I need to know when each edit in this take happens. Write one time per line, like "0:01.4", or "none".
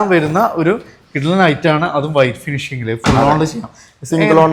none